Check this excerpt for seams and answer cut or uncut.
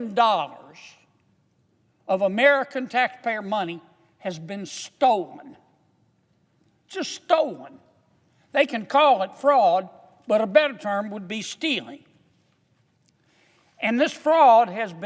uncut